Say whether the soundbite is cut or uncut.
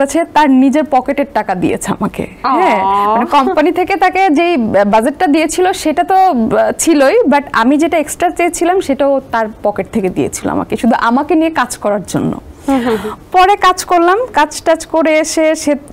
uncut